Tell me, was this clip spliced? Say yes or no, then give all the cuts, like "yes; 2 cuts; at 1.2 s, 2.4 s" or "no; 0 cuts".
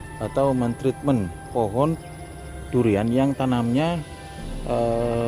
yes; 1 cut; at 1.5 s